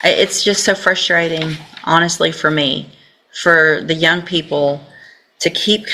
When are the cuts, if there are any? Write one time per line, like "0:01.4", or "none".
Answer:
none